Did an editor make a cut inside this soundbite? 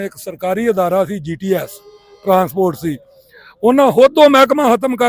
no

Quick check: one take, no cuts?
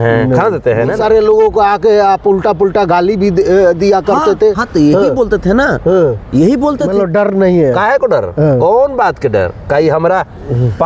no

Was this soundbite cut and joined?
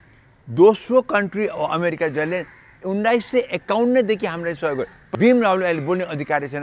yes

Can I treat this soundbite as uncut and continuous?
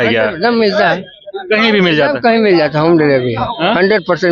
yes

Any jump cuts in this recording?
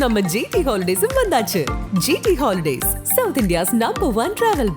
no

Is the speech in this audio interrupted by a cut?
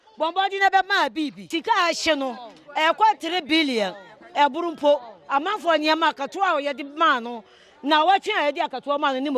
yes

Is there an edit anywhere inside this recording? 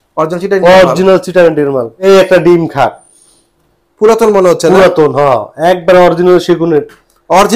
yes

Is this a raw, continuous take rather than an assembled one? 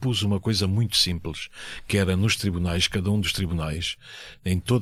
yes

